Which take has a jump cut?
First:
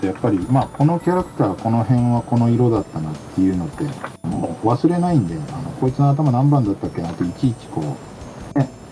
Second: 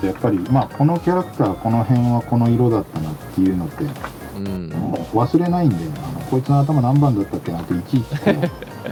first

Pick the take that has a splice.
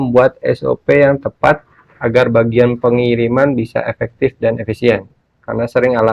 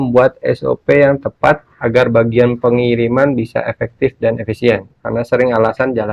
second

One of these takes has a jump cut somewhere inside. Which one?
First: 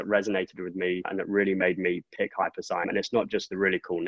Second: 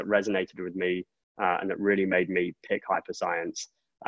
first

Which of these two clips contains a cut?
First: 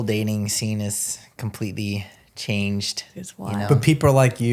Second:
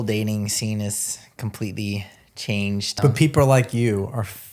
second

